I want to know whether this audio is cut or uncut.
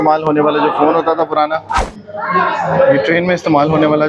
cut